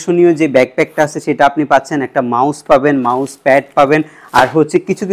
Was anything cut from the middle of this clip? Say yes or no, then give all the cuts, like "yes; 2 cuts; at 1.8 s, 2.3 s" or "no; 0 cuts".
no; 0 cuts